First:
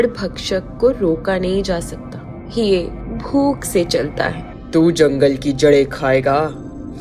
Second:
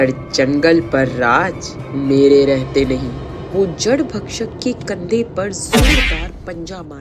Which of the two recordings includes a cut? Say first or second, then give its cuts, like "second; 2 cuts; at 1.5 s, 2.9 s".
first; 1 cut; at 4.4 s